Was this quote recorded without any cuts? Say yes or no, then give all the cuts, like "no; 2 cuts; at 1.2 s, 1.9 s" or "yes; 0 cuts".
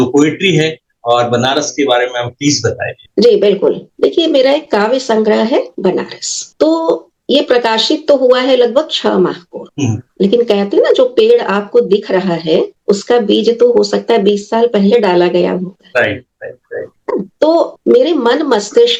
yes; 0 cuts